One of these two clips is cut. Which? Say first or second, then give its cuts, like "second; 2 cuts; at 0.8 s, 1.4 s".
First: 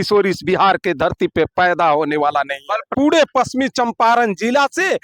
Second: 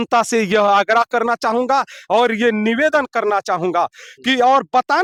first; 1 cut; at 2.9 s